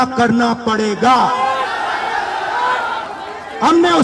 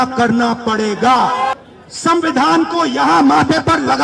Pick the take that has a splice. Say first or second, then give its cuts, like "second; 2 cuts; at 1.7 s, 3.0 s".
second; 1 cut; at 1.6 s